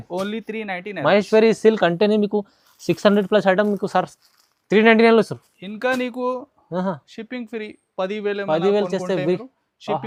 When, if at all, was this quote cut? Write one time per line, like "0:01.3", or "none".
none